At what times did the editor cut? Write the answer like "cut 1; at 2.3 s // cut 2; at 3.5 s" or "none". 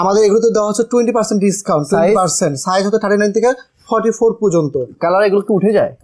cut 1; at 5.0 s